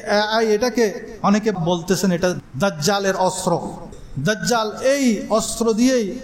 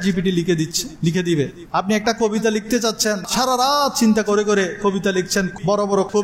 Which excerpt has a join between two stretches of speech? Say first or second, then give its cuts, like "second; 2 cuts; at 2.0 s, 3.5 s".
second; 1 cut; at 1.6 s